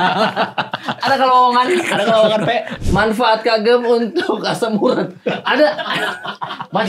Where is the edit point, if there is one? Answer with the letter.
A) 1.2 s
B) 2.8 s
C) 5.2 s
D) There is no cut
B